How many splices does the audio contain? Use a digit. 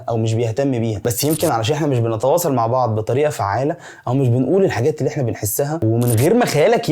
2